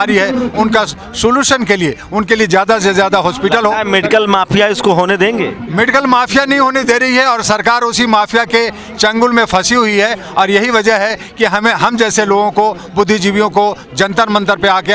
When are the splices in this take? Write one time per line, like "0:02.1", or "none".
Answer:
none